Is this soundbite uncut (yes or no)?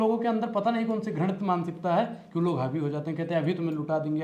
yes